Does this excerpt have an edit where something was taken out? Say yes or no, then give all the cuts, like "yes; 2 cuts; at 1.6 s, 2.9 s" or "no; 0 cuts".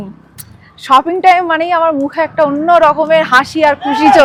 no; 0 cuts